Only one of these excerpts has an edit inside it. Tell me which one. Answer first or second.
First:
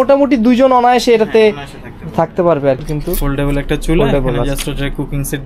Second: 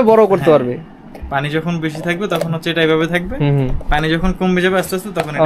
first